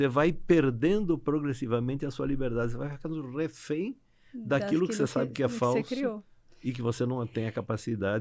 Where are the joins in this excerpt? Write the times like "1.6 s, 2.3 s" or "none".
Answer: none